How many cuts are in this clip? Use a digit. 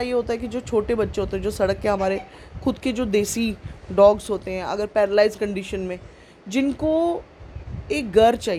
0